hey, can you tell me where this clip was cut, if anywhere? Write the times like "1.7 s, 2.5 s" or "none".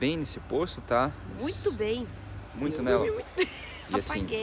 none